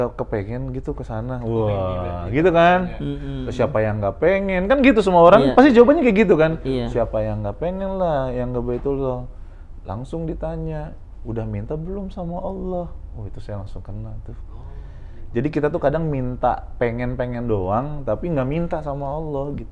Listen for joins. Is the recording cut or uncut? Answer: uncut